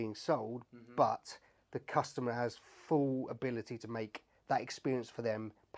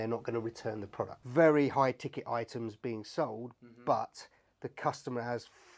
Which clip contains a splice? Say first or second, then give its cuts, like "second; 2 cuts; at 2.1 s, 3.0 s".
second; 1 cut; at 1.2 s